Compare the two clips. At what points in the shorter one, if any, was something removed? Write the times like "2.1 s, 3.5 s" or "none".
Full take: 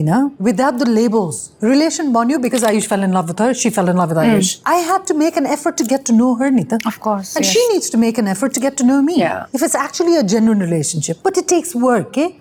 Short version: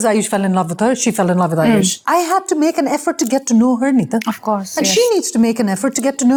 none